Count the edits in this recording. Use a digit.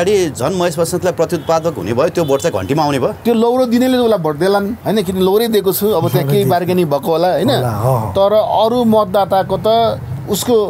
2